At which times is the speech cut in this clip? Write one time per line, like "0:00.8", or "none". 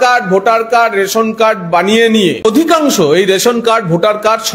0:02.4